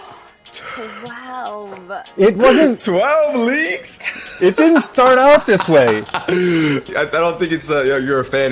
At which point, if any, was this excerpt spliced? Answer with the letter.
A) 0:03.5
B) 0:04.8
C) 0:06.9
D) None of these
C